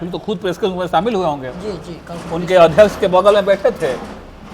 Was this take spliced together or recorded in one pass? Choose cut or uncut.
uncut